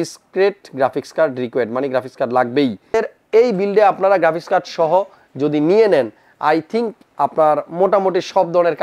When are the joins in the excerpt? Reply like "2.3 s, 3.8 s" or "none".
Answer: 2.9 s